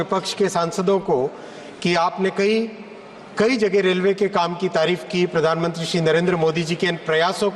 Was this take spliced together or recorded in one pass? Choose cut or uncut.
uncut